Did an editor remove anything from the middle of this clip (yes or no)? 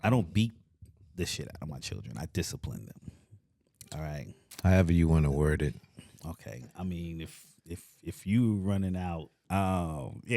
yes